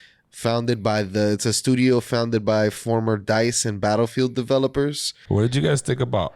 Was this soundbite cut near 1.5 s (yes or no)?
no